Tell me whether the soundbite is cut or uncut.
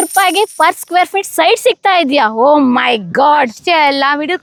uncut